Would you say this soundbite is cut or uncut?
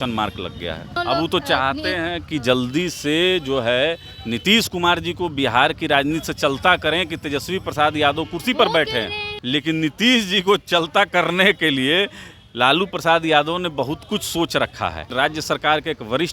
cut